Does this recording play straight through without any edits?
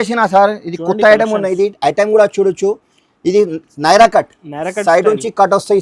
yes; 0 cuts

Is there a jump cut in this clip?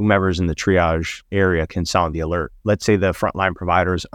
yes; 2 cuts; at 1.3 s, 2.6 s

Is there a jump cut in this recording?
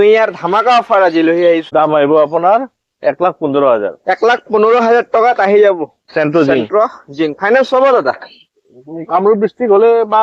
yes; 1 cut; at 1.7 s

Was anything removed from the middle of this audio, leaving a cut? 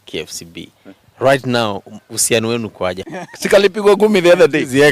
yes; 1 cut; at 3.0 s

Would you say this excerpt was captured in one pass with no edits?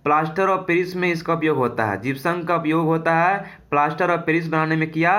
yes; 0 cuts

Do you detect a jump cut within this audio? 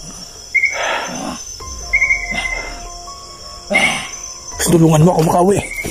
yes; 1 cut; at 4.6 s

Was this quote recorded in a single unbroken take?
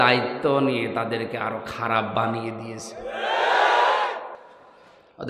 yes; 0 cuts

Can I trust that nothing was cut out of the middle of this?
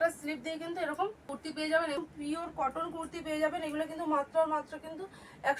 no; 2 cuts; at 1.2 s, 2.0 s

